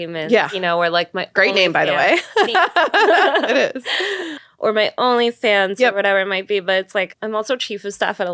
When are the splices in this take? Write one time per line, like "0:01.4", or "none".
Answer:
0:04.2
0:07.1

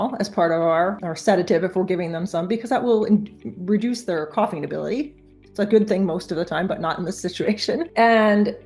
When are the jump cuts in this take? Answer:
0:01.0

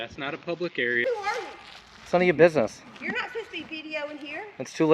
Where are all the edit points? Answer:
0:01.0

